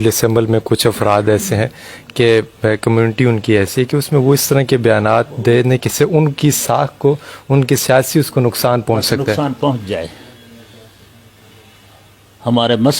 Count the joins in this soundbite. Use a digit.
0